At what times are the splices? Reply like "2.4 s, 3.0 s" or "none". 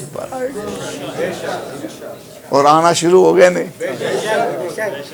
none